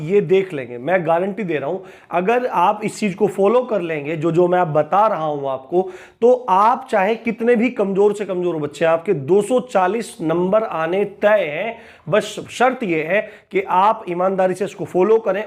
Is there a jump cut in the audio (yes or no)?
no